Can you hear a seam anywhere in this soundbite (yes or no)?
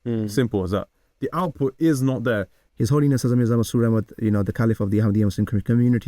yes